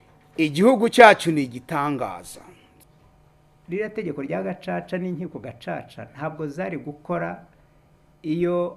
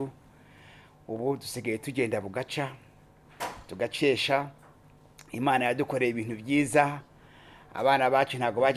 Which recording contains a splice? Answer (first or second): first